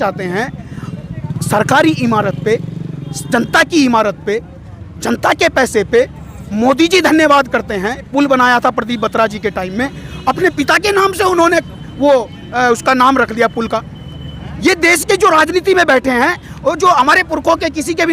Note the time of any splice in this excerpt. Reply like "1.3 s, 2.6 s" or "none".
8.1 s